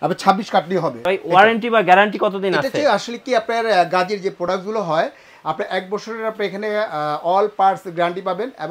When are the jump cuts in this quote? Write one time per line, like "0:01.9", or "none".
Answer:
0:01.0